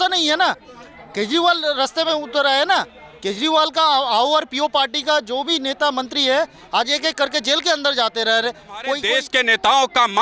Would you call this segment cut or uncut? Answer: cut